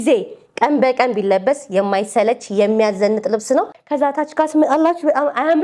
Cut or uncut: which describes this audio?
cut